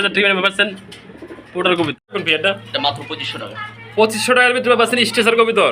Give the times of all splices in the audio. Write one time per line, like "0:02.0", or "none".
0:02.1